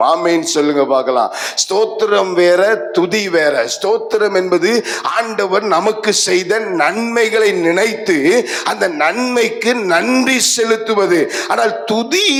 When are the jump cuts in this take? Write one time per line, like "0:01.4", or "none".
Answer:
none